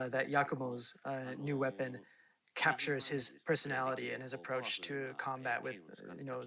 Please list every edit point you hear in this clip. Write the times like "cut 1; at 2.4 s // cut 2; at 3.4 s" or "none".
none